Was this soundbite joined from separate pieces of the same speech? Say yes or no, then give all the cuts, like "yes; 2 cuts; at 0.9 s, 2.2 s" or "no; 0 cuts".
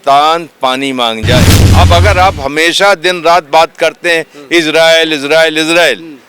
yes; 1 cut; at 1.7 s